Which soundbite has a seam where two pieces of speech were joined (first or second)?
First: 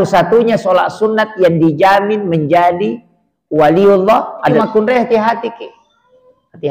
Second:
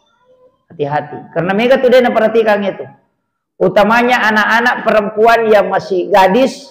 first